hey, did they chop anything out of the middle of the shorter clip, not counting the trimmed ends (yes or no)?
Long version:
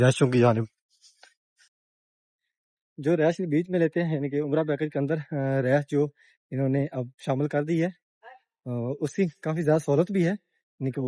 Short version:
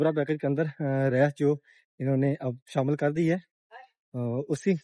no